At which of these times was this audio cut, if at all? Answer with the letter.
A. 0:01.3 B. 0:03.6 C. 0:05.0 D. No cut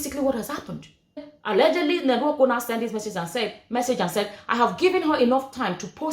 A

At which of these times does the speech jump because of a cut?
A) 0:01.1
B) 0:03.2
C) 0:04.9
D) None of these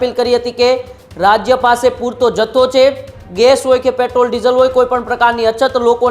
B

